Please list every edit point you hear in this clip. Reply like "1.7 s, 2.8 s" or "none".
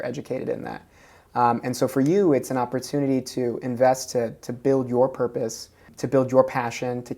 5.9 s